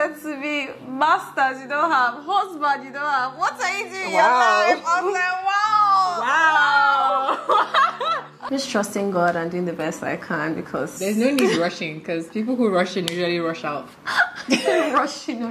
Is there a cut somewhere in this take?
yes; 3 cuts; at 4.8 s, 8.5 s, 10.9 s

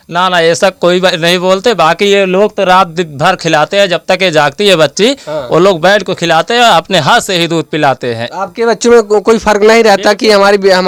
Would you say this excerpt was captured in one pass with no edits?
yes; 0 cuts

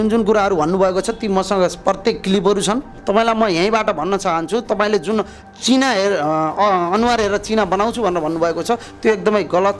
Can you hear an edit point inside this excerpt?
yes; 1 cut; at 2.9 s

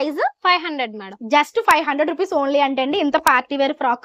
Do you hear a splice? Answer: no; 0 cuts

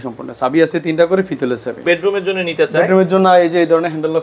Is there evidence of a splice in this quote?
yes; 1 cut; at 1.8 s

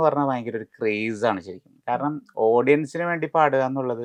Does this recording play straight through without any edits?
yes; 0 cuts

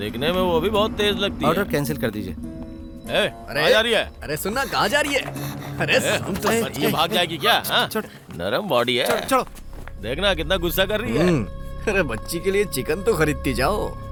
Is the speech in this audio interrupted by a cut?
no; 0 cuts

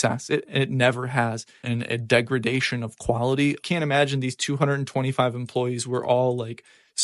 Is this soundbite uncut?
no; 2 cuts; at 1.6 s, 3.6 s

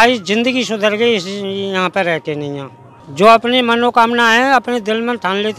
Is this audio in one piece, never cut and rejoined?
no; 1 cut; at 3.0 s

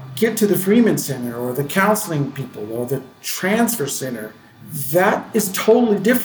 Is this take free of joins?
yes; 0 cuts

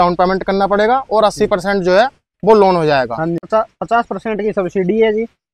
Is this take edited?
yes; 1 cut; at 3.4 s

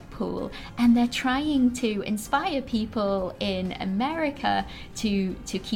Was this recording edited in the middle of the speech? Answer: no; 0 cuts

